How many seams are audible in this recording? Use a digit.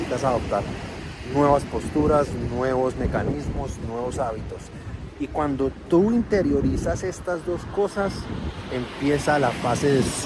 0